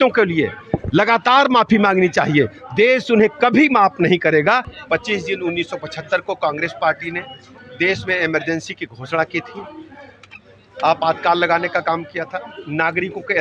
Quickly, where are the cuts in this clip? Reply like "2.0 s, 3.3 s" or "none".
4.7 s